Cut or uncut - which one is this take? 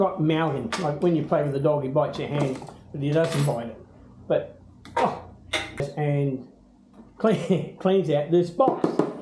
cut